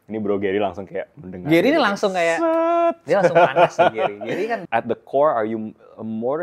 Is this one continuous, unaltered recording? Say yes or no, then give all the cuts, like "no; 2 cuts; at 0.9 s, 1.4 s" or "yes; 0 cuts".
no; 1 cut; at 4.6 s